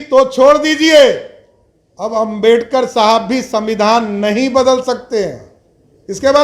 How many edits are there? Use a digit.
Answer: 0